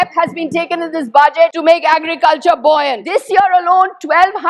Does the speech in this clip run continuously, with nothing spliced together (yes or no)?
no